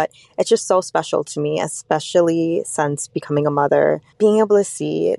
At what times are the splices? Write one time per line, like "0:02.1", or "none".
0:04.1